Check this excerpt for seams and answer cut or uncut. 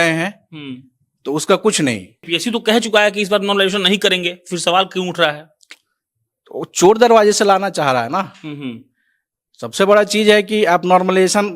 cut